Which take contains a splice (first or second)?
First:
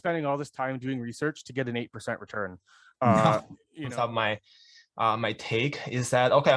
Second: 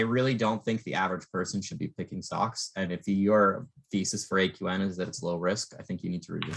first